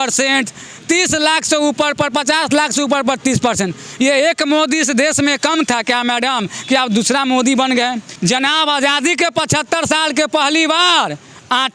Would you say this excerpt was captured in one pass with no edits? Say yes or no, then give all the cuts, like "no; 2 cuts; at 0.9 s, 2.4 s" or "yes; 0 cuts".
no; 1 cut; at 8.1 s